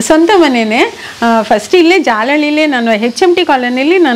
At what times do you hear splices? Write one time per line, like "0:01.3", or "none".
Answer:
none